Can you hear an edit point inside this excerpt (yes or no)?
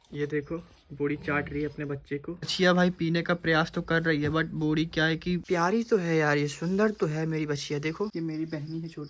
yes